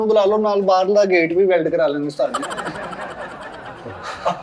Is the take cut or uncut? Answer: uncut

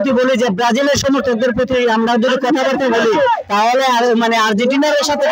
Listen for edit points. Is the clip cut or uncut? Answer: uncut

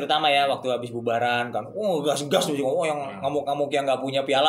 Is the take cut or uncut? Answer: uncut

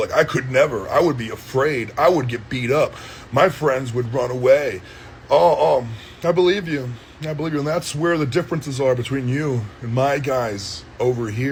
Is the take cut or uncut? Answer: uncut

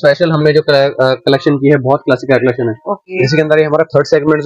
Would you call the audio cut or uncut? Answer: cut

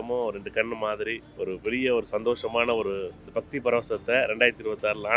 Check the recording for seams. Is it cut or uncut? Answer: cut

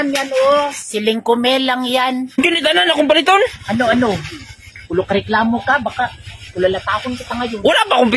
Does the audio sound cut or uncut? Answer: uncut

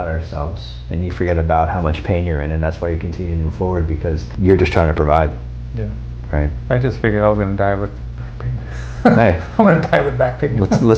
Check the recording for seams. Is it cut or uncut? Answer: uncut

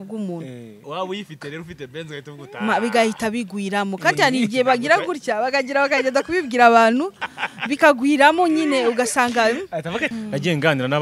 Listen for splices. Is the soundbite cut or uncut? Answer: cut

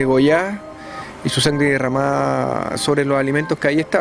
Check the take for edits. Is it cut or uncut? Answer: uncut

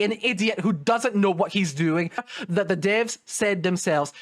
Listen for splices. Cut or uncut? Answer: cut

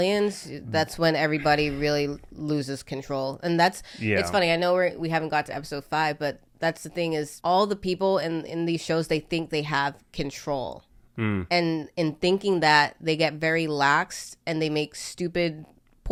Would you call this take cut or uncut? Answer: uncut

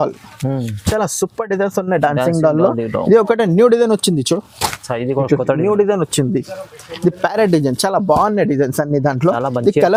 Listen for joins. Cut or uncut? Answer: uncut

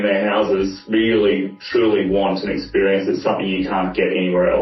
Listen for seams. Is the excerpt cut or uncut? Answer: uncut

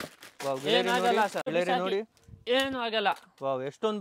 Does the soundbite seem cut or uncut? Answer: cut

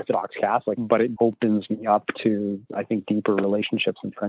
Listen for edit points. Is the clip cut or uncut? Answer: cut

